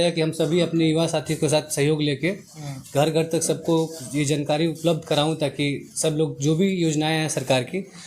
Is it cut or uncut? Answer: uncut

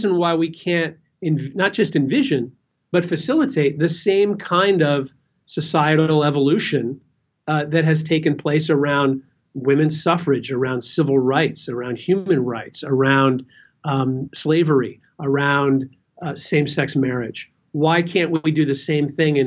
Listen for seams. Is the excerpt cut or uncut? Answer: uncut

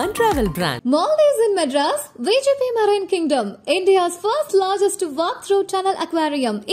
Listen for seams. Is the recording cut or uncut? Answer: uncut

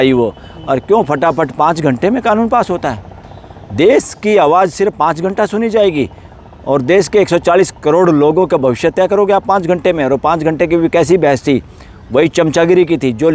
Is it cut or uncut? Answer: uncut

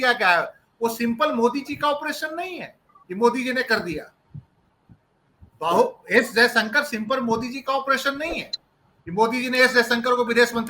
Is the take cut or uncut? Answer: uncut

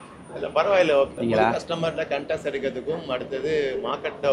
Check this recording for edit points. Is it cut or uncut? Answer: cut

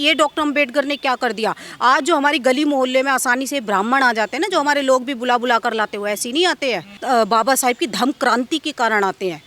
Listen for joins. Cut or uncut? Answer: uncut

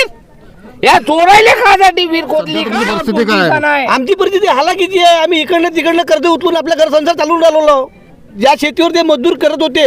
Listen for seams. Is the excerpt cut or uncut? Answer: cut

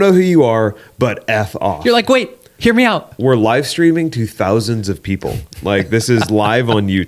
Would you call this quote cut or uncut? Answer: uncut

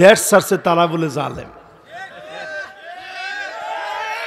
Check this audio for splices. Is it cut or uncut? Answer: uncut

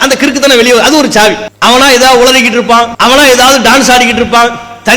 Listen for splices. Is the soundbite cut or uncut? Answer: cut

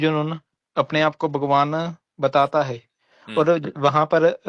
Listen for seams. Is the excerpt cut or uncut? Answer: uncut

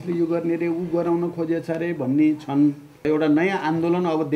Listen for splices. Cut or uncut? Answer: cut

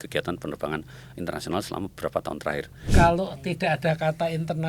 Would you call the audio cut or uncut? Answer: cut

